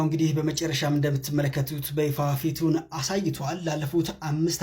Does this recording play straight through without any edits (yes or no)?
yes